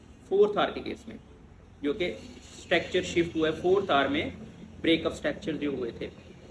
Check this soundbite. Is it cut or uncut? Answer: uncut